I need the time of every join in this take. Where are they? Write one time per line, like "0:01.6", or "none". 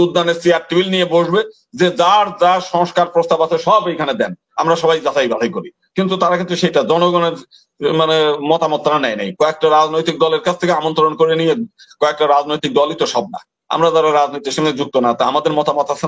none